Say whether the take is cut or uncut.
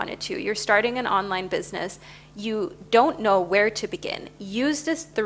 uncut